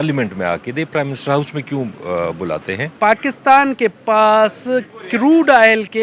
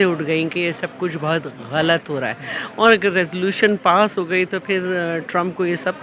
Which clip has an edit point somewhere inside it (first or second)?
first